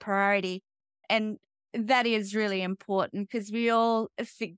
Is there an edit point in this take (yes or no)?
no